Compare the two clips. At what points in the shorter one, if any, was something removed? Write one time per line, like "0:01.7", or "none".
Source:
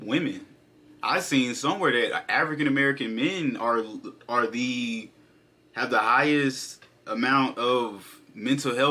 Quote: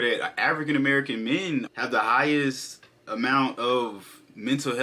0:01.7